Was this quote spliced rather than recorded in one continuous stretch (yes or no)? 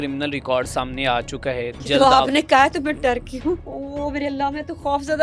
yes